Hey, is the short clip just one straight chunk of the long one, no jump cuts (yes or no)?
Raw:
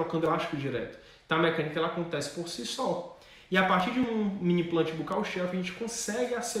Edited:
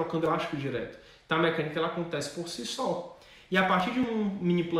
yes